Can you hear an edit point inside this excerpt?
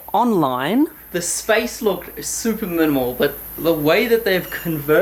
no; 0 cuts

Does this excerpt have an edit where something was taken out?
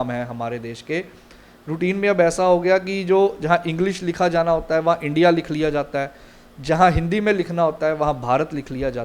no; 0 cuts

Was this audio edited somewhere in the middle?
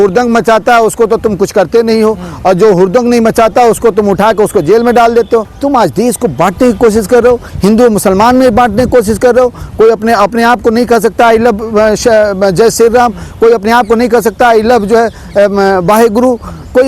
no; 0 cuts

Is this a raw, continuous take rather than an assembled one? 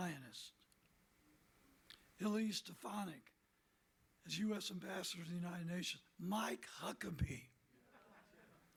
yes; 0 cuts

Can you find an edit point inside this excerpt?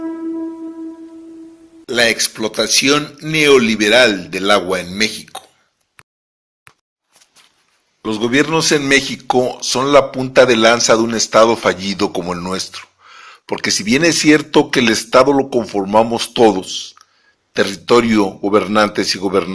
yes; 1 cut; at 1.2 s

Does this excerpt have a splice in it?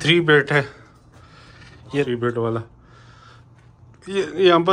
yes; 1 cut; at 1.9 s

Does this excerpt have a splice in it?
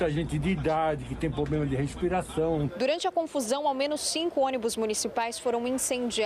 yes; 1 cut; at 2.7 s

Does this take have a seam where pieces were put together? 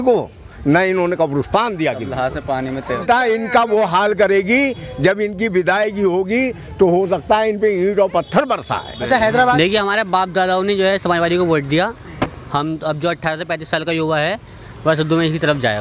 yes; 2 cuts; at 3.0 s, 9.5 s

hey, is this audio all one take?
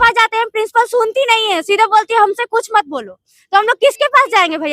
yes; 0 cuts

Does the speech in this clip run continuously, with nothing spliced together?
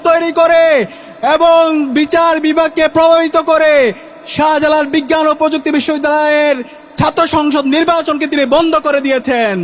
yes; 0 cuts

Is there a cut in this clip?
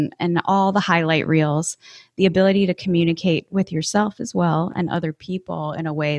no; 0 cuts

